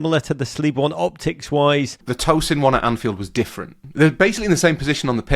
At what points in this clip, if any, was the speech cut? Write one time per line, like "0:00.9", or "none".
0:02.1
0:03.8